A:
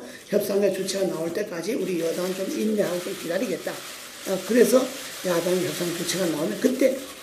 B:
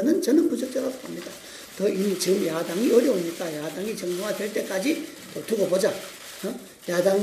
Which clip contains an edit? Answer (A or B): B